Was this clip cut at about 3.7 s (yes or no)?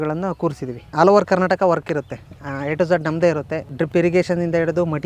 yes